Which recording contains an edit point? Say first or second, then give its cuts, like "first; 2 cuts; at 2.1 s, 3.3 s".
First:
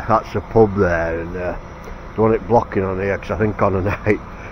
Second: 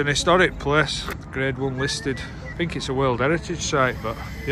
second; 2 cuts; at 1.0 s, 2.4 s